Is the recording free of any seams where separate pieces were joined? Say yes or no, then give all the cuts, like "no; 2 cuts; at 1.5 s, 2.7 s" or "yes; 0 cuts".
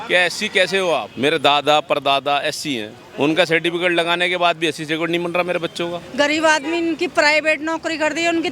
no; 3 cuts; at 1.1 s, 3.0 s, 6.0 s